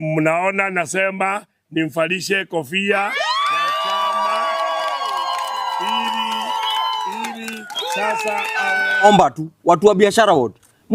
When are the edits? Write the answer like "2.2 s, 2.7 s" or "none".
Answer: 9.0 s